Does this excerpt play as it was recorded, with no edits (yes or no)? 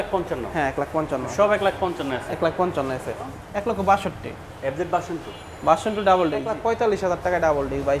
no